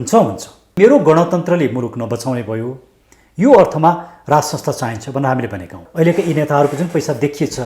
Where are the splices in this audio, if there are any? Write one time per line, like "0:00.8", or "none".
0:00.8
0:05.8